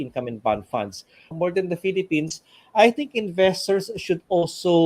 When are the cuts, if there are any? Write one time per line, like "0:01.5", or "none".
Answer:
0:01.3